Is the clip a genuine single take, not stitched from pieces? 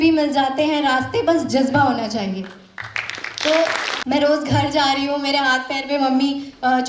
no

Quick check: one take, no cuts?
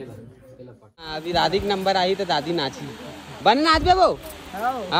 no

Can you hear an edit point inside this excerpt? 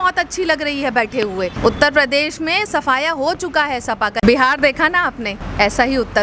yes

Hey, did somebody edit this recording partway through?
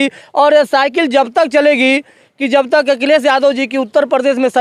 no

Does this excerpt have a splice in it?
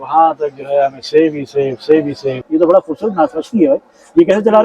yes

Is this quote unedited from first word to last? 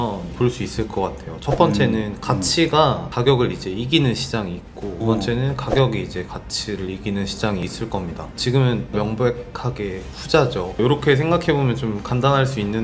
no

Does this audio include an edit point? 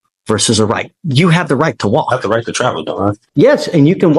yes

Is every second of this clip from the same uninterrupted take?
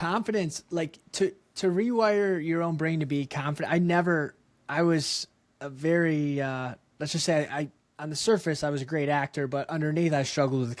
no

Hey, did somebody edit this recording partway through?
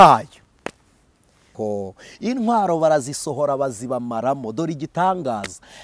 yes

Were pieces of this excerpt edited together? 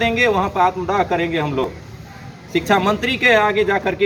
no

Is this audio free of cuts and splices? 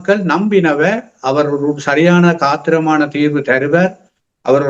yes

